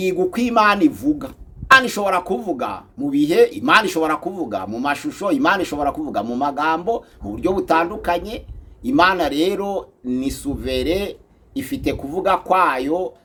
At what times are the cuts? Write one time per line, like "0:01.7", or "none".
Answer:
none